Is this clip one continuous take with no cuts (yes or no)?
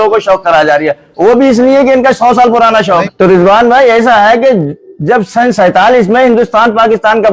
no